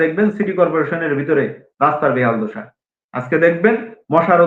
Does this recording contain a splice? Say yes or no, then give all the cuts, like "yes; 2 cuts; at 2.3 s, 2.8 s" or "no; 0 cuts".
no; 0 cuts